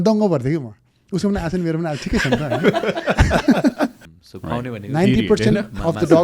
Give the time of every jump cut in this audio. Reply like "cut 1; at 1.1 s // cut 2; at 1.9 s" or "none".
cut 1; at 4.1 s